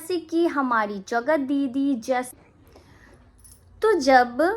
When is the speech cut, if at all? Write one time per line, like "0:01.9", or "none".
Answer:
0:02.4